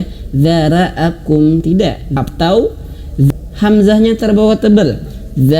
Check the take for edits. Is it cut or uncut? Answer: cut